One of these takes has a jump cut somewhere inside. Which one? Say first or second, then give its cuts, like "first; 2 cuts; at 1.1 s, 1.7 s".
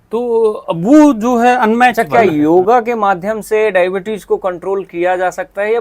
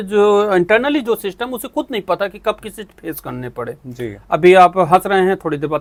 first; 1 cut; at 1.9 s